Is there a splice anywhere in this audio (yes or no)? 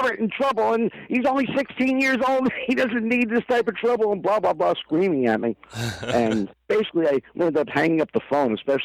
no